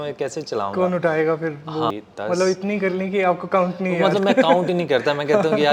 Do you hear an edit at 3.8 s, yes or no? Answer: no